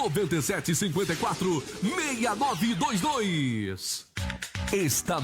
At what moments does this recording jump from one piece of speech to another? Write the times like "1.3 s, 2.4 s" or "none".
4.0 s